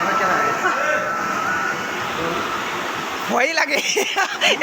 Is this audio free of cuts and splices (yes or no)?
yes